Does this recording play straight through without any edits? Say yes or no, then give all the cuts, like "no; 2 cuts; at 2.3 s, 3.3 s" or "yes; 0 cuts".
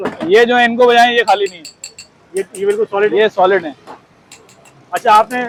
yes; 0 cuts